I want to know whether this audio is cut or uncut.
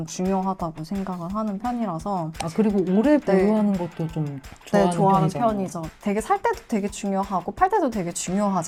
uncut